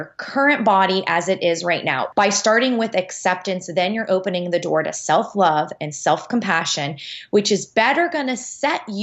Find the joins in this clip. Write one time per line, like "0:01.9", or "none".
0:02.0